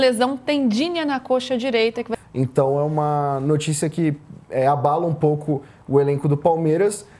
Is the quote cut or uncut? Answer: cut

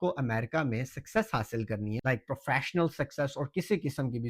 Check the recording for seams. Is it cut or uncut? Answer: cut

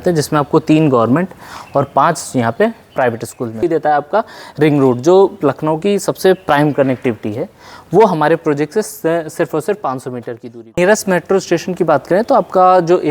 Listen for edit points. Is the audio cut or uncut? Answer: cut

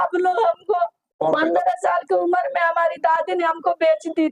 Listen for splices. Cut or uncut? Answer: cut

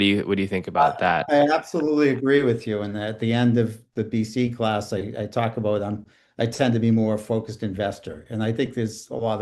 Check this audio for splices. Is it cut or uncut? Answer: uncut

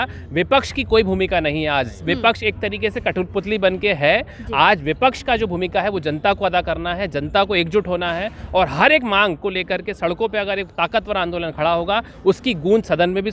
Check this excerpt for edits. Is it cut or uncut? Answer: uncut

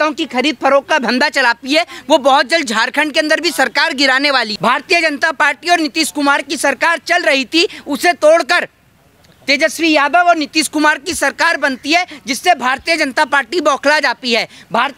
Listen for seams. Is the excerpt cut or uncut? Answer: cut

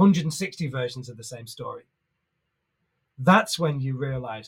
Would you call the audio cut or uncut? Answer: uncut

